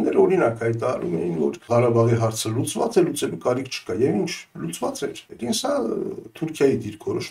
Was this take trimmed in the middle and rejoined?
yes; 2 cuts; at 1.6 s, 5.3 s

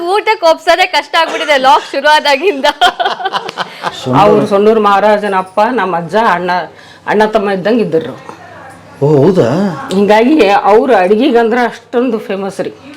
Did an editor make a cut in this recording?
yes; 1 cut; at 4.0 s

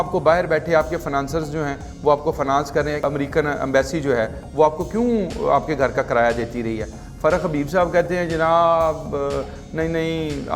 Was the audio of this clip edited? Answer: yes; 2 cuts; at 3.0 s, 7.0 s

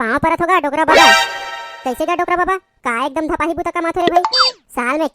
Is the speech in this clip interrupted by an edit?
no; 0 cuts

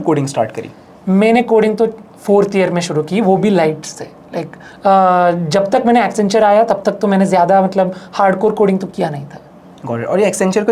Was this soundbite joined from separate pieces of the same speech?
no; 0 cuts

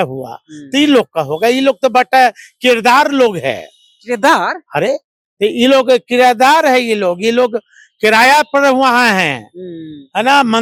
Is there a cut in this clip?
no; 0 cuts

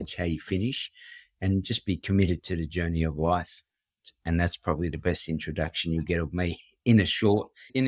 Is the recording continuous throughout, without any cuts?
yes; 0 cuts

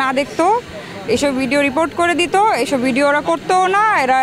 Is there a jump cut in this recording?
no; 0 cuts

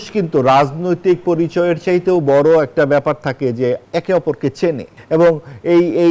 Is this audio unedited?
no; 2 cuts; at 3.8 s, 4.9 s

